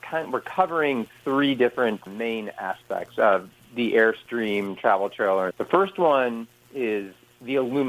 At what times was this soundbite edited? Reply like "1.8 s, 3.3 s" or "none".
5.6 s